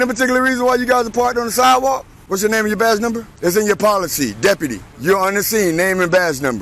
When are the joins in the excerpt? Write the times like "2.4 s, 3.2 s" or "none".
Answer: 2.1 s, 3.3 s, 4.9 s